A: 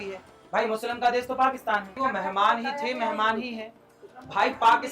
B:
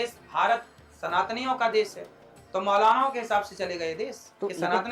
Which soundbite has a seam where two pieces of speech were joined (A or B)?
A